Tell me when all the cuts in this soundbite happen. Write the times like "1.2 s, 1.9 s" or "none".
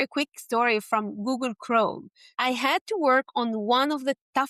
2.2 s